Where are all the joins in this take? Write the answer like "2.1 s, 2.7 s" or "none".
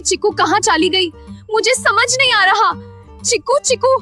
none